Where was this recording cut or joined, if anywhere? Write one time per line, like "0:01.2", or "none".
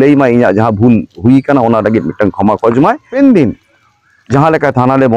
0:03.1